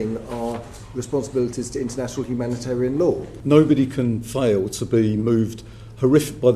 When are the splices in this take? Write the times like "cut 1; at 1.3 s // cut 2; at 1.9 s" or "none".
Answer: cut 1; at 3.3 s